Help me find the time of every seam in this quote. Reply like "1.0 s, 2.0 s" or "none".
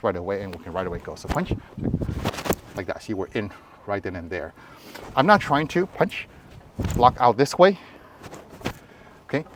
none

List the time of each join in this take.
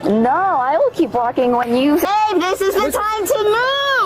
2.1 s

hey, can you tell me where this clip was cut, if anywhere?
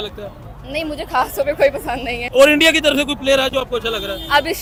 none

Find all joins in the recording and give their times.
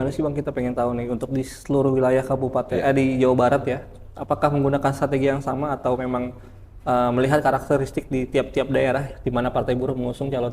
none

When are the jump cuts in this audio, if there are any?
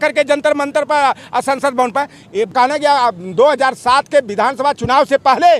2.5 s

